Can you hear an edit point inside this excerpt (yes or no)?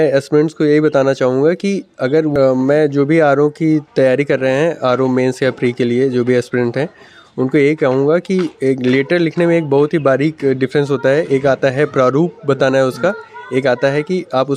yes